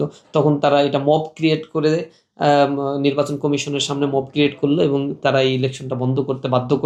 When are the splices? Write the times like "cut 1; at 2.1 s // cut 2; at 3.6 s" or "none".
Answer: none